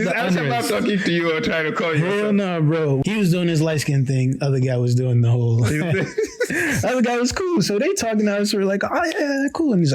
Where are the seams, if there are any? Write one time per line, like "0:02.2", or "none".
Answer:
0:03.0